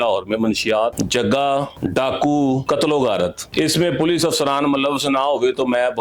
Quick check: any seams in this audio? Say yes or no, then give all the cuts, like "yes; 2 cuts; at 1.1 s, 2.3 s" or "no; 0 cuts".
no; 0 cuts